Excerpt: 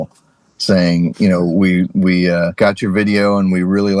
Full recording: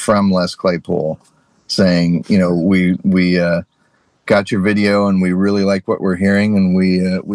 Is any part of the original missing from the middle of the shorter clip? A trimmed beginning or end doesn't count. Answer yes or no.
yes